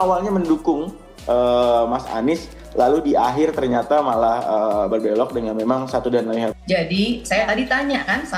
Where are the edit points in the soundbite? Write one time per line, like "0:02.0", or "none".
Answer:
0:06.5

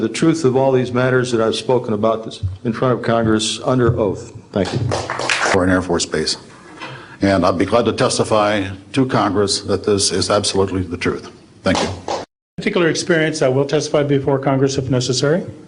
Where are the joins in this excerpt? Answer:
0:05.5
0:12.5

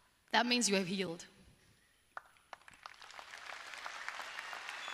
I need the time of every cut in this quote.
none

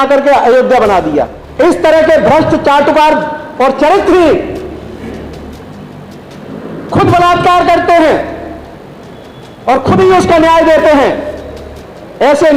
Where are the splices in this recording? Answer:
0:01.4

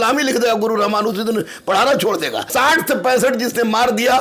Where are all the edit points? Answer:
0:02.5

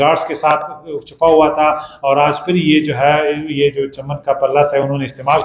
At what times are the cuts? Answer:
none

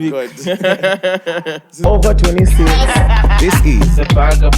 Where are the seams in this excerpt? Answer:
0:01.7

